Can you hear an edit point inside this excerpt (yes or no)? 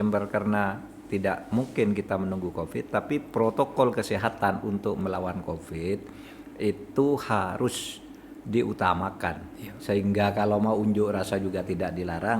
yes